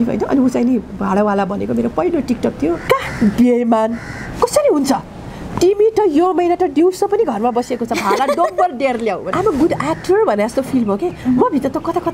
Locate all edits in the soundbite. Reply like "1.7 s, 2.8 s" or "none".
2.8 s, 9.3 s

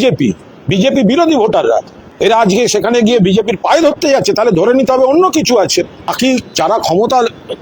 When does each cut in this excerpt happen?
2.0 s, 6.1 s

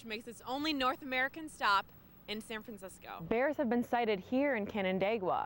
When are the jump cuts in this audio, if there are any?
3.1 s

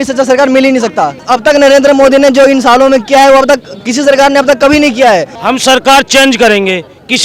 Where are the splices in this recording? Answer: 1.2 s, 5.3 s

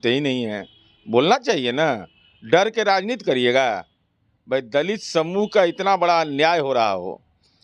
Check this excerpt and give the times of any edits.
none

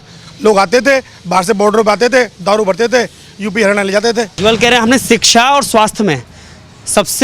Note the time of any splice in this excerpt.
4.3 s

